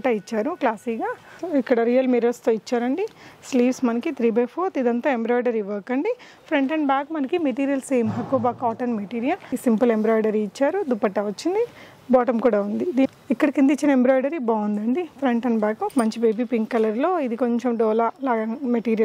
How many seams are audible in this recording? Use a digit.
4